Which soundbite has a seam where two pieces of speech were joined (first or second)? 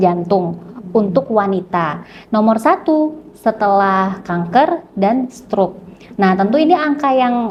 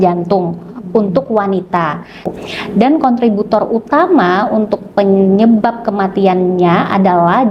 second